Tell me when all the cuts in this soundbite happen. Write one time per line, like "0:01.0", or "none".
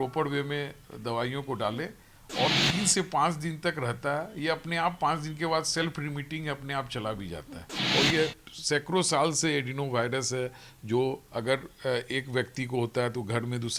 0:07.7